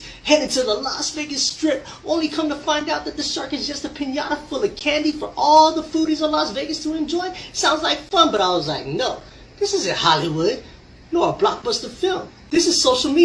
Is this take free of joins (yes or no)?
yes